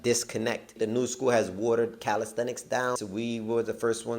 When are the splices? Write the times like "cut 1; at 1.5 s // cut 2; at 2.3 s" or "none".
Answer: cut 1; at 0.7 s // cut 2; at 3.0 s